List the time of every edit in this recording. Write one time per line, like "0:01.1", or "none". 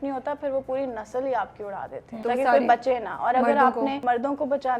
0:02.1
0:04.0